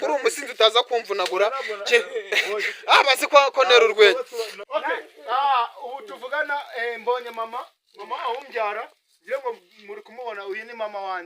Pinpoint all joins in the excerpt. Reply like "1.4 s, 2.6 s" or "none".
4.5 s

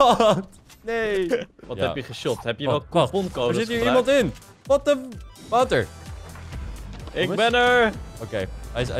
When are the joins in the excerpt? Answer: 1.5 s

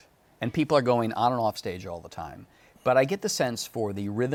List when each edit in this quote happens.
none

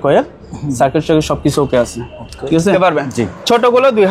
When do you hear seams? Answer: 2.8 s

